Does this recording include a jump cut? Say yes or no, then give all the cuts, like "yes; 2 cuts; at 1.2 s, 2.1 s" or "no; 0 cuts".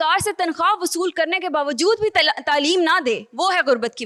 no; 0 cuts